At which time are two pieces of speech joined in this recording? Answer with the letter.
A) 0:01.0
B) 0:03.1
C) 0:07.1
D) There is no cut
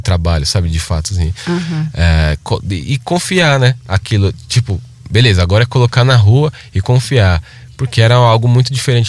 D